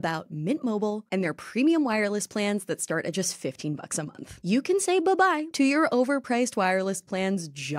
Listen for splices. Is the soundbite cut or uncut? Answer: cut